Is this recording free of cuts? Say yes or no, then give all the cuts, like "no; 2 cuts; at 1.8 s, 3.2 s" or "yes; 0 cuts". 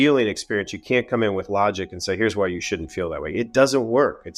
yes; 0 cuts